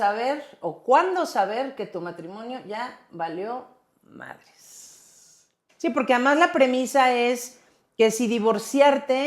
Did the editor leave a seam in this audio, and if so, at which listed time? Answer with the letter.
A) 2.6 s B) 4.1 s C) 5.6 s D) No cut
C